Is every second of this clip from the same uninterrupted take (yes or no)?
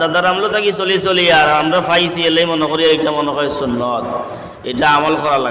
yes